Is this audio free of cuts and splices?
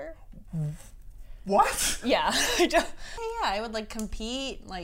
no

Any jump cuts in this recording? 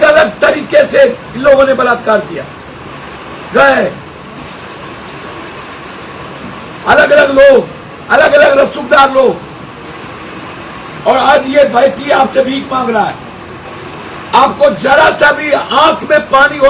no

